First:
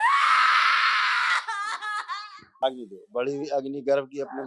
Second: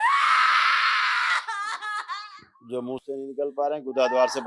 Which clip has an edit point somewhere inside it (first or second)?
first